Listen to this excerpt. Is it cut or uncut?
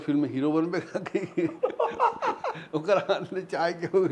uncut